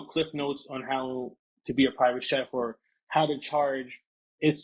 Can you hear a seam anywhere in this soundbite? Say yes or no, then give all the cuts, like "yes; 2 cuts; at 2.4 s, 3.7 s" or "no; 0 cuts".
no; 0 cuts